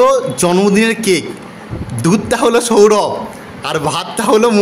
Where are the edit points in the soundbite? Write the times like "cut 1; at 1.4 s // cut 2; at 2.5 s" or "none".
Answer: none

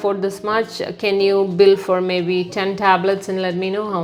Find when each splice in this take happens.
none

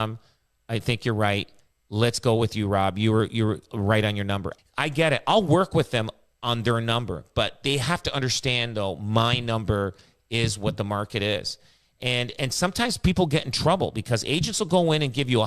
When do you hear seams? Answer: cut 1; at 4.5 s

